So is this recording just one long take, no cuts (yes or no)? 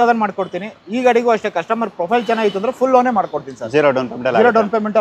yes